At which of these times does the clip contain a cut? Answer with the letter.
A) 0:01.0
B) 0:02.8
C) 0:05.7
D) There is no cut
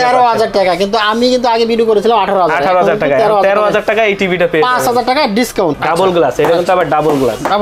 C